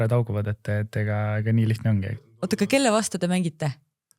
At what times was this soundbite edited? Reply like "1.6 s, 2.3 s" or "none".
2.2 s